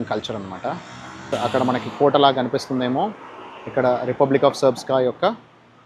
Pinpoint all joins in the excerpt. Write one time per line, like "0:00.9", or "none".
0:01.3